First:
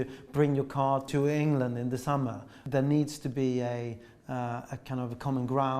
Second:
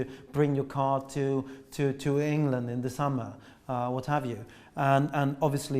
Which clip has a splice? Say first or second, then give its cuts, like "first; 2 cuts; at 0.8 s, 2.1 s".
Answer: first; 2 cuts; at 1.1 s, 2.6 s